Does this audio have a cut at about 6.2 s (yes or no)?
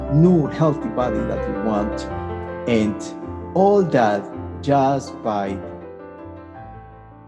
yes